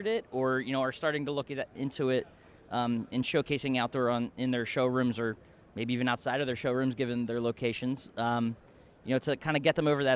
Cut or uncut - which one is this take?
uncut